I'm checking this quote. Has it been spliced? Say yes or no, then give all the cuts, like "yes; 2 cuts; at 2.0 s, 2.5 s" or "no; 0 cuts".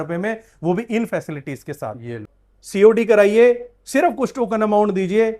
yes; 1 cut; at 2.3 s